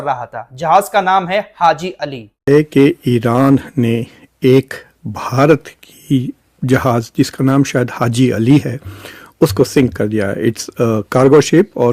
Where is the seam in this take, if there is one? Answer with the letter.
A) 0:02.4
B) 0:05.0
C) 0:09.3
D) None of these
A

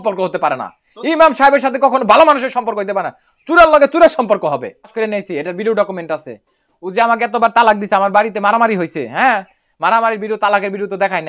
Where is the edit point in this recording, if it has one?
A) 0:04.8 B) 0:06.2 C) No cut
C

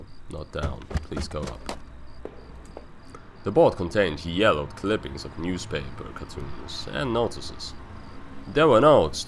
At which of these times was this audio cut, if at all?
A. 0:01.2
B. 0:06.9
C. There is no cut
B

